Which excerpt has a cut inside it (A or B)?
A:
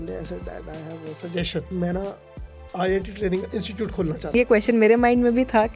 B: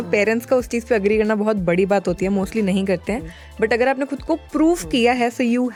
A